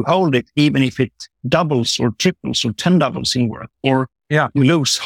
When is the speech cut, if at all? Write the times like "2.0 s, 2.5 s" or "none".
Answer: none

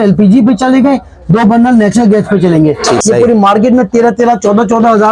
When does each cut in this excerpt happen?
3.0 s

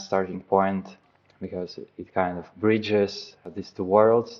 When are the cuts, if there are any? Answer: 1.1 s, 3.4 s

